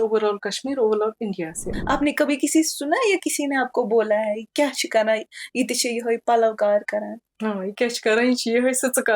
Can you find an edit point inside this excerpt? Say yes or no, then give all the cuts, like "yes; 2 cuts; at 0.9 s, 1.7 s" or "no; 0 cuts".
yes; 1 cut; at 1.6 s